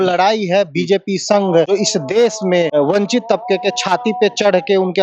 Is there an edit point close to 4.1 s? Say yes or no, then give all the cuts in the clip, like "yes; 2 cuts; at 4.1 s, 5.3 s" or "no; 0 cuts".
no; 2 cuts; at 1.7 s, 2.7 s